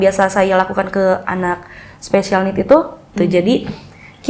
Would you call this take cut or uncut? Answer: cut